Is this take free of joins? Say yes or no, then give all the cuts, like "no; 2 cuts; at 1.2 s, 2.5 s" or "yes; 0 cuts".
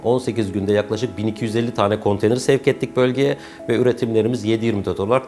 yes; 0 cuts